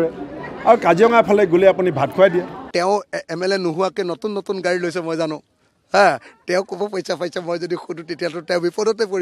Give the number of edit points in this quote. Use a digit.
1